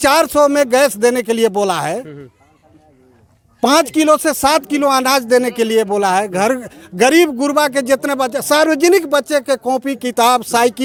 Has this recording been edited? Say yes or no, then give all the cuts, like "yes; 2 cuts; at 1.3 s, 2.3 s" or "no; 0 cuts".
no; 0 cuts